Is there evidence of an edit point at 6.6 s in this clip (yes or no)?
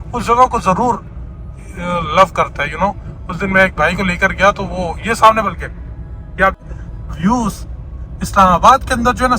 yes